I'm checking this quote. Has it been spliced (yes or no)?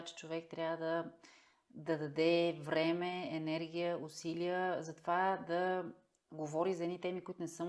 no